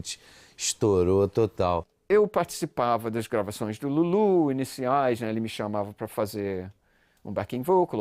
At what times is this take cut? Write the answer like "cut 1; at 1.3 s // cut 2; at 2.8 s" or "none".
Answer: cut 1; at 1.9 s